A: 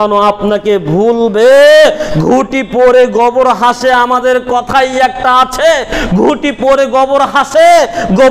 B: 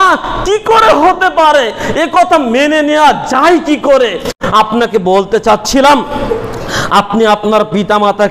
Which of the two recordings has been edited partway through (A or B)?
B